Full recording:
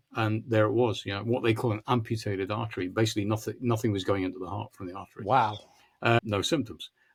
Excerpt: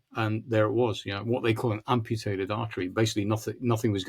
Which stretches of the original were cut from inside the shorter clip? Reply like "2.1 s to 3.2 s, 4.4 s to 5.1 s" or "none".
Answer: none